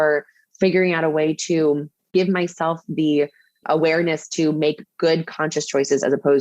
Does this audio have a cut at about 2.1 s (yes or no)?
yes